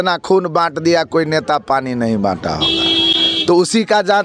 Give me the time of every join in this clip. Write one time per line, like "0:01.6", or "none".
none